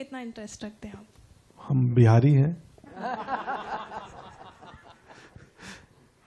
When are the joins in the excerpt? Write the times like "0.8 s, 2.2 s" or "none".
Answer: none